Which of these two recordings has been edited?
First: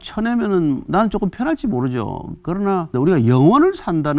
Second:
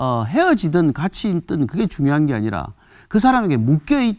first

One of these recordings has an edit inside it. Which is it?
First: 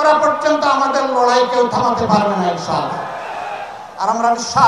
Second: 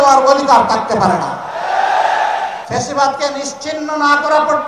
second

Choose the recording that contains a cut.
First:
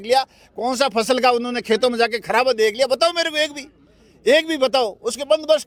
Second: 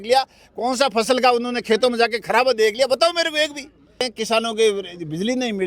second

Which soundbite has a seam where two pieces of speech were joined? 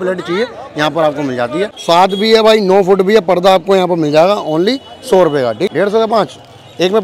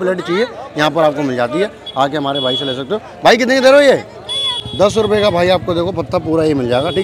first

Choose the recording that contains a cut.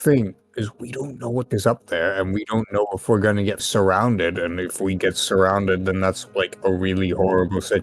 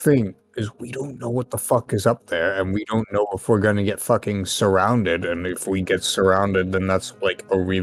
first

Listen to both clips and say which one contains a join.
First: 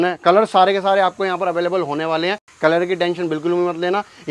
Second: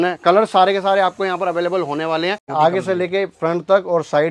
second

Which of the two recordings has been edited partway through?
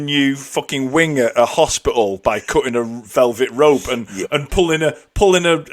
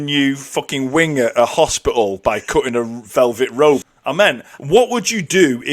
second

